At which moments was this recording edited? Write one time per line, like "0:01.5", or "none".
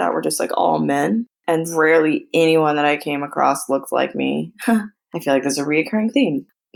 none

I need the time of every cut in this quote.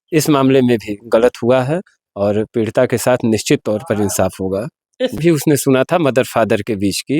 0:05.2

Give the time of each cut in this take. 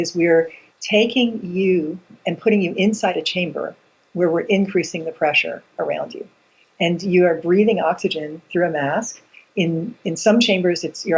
0:02.1

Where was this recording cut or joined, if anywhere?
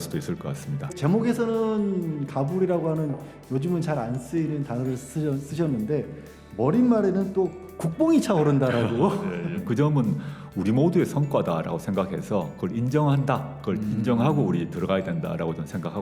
0:00.9
0:09.6

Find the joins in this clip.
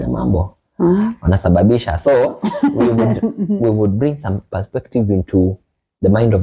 none

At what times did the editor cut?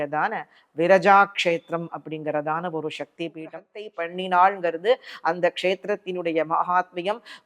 0:03.9

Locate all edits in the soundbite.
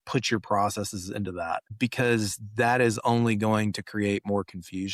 0:01.7

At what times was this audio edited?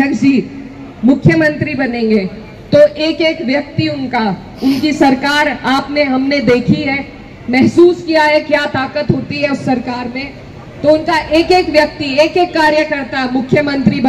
none

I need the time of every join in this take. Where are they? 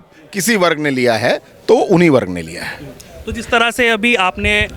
none

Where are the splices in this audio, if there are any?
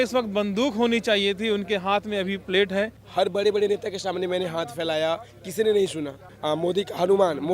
0:03.0
0:06.3

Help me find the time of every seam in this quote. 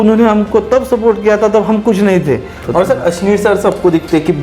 0:02.6

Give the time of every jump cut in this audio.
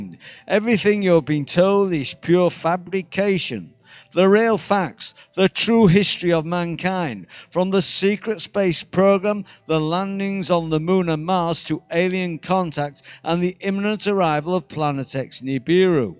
0:06.7

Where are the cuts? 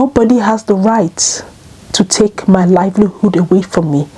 none

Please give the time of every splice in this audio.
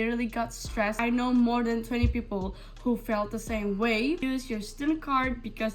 0:01.0
0:04.2

